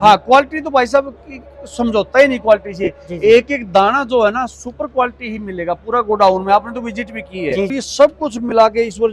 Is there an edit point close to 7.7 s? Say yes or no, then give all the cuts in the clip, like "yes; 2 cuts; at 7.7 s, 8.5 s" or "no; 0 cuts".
yes; 1 cut; at 7.7 s